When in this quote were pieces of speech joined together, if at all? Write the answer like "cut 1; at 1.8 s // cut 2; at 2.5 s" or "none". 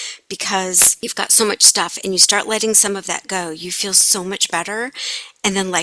cut 1; at 0.9 s